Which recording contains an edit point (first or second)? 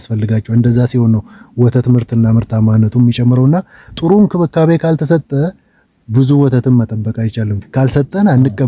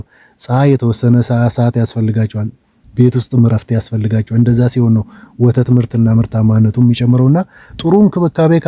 first